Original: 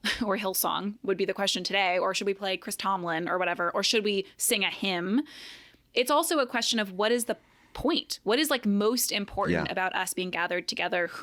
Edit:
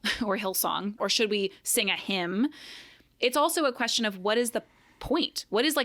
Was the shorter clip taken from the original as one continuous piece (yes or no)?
no